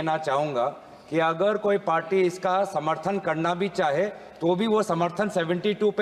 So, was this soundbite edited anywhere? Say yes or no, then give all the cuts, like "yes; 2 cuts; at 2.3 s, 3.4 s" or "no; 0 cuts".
no; 0 cuts